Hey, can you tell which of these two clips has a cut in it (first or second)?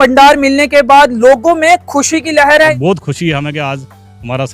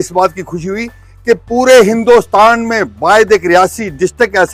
first